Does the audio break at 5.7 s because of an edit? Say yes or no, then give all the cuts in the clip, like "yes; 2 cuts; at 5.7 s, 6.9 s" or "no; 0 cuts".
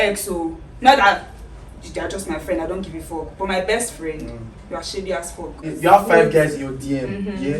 yes; 1 cut; at 5.7 s